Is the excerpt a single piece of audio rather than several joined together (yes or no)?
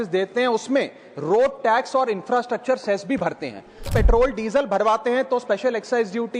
no